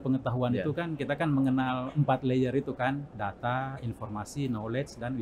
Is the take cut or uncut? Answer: uncut